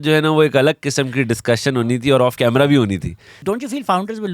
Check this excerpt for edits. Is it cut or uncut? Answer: cut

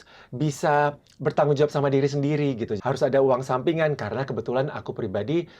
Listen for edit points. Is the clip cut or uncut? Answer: cut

